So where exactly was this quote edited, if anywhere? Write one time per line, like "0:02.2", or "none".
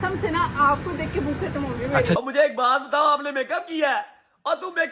0:02.0